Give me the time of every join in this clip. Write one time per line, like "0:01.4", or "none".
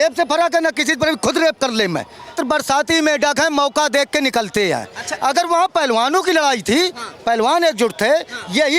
0:02.4